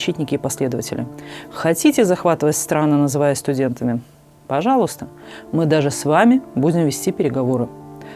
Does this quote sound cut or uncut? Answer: uncut